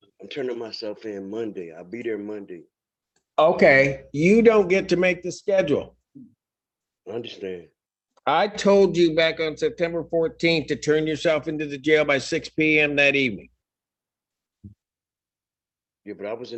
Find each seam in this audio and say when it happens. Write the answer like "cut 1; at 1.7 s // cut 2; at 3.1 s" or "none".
none